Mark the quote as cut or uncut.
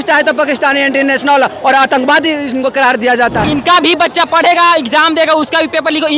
cut